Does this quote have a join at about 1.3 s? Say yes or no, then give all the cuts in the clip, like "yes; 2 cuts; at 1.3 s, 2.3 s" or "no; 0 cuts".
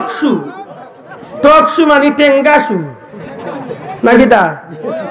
no; 0 cuts